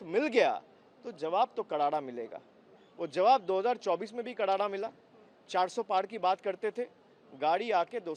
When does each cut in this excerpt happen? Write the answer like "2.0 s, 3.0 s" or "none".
none